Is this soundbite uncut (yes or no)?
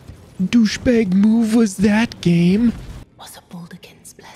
no